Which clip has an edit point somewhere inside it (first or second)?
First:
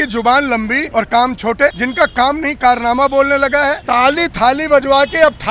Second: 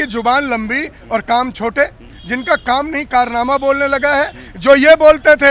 first